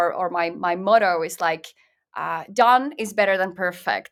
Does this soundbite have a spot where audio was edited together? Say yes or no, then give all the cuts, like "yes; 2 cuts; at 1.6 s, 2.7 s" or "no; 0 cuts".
no; 0 cuts